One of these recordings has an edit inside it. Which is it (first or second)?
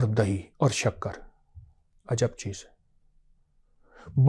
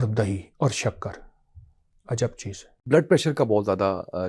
second